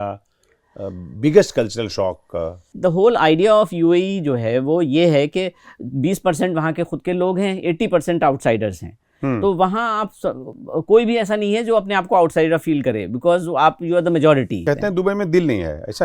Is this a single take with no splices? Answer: no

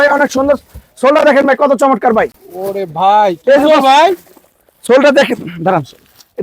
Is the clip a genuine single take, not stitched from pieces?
yes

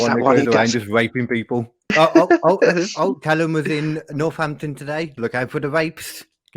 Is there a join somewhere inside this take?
yes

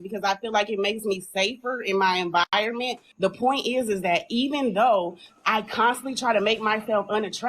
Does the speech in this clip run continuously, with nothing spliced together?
no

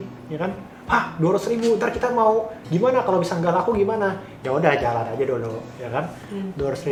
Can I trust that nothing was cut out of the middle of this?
yes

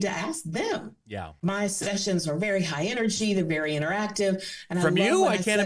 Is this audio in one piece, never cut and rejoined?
no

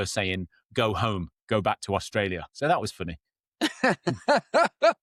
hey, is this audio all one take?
yes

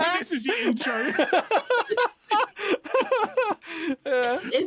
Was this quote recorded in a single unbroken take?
yes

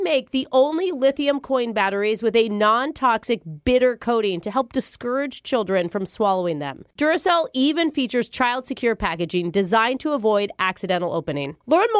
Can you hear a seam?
no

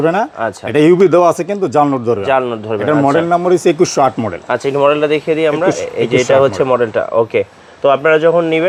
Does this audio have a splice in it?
no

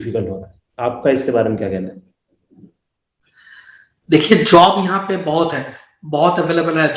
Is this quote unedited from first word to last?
yes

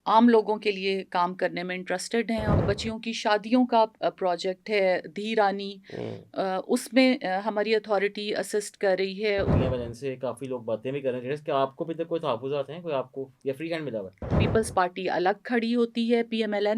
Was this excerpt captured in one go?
no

